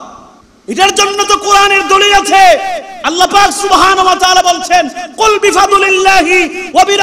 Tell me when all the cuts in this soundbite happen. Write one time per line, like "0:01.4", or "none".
none

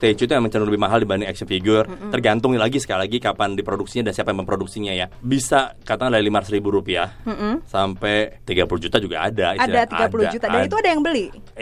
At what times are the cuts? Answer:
0:05.1
0:08.4

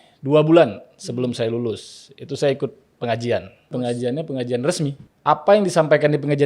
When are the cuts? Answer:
0:03.6
0:05.1

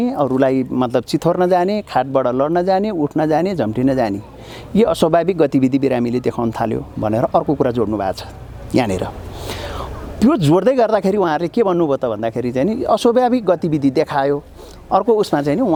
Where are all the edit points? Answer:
none

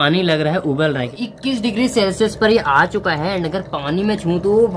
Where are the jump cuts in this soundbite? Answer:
0:01.1

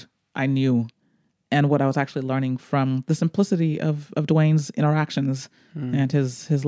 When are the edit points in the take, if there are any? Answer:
none

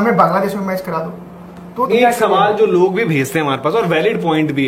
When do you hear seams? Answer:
0:01.9

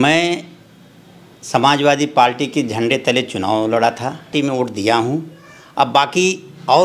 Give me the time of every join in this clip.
0:04.3

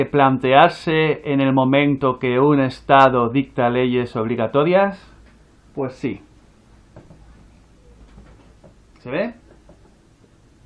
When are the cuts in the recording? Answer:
none

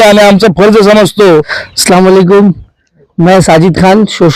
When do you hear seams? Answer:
none

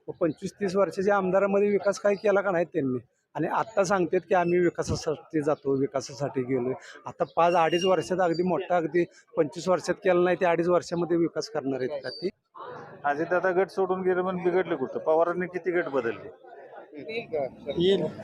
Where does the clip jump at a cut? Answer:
0:12.3
0:17.2

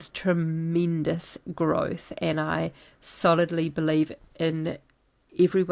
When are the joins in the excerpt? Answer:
none

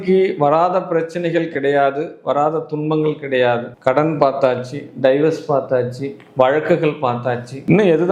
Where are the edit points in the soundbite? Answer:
none

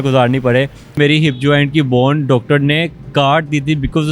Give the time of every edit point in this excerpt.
0:01.0

